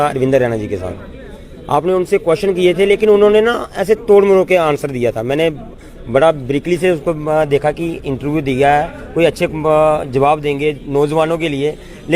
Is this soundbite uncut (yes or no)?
yes